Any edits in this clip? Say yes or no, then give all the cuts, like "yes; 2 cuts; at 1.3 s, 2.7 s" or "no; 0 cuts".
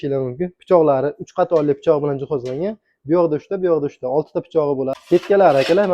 yes; 1 cut; at 4.9 s